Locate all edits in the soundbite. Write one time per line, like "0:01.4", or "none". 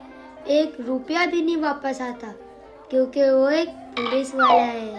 none